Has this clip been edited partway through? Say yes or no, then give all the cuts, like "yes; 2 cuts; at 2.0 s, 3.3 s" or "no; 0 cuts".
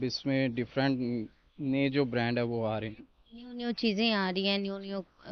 no; 0 cuts